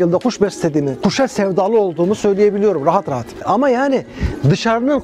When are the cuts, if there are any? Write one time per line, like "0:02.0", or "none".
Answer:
0:00.9
0:03.4